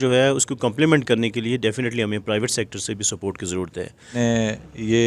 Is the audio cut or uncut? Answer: cut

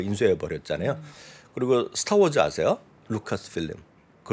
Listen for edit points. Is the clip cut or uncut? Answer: uncut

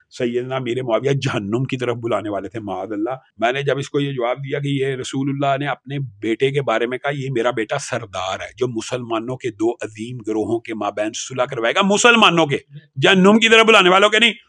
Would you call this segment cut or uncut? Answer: cut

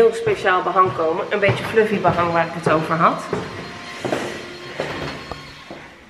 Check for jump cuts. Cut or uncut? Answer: uncut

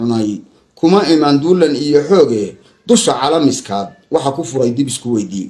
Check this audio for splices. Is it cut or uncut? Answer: uncut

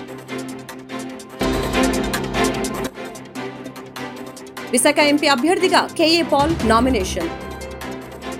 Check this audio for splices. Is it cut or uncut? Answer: uncut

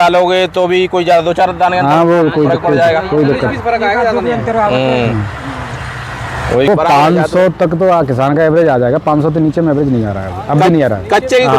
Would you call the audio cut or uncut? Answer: cut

